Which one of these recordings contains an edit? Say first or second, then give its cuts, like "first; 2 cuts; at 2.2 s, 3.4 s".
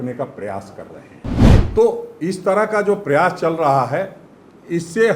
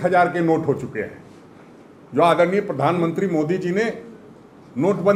first; 1 cut; at 1.3 s